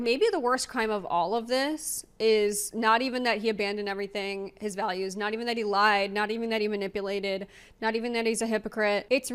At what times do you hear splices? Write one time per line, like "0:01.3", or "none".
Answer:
none